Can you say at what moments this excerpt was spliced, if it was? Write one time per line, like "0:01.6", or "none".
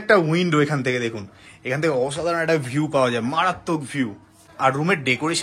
0:04.5

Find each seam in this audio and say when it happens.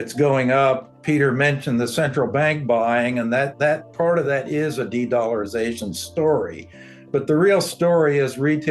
0:00.9

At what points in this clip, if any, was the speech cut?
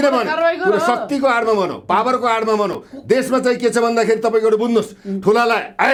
none

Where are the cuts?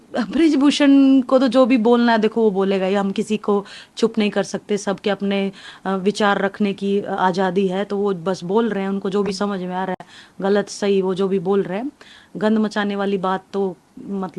none

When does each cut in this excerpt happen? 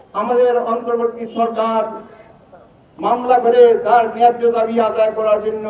none

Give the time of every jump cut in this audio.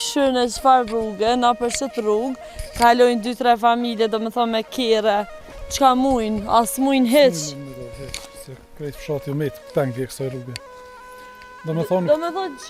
none

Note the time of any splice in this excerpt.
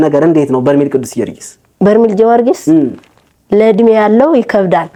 none

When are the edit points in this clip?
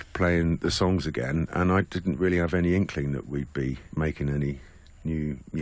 0:03.8

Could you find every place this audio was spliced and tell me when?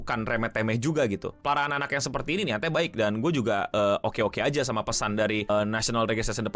none

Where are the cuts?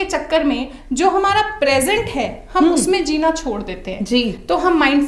none

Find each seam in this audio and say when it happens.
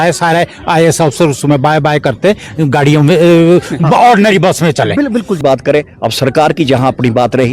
0:05.4

